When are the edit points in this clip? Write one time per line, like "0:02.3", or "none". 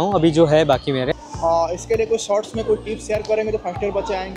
0:01.1